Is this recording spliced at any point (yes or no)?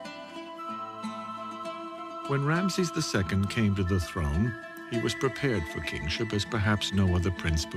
yes